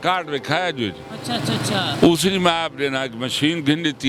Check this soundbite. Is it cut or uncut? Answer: uncut